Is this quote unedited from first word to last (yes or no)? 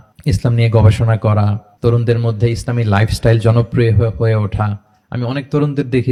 yes